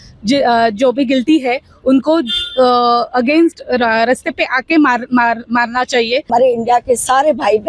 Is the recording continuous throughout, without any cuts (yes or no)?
no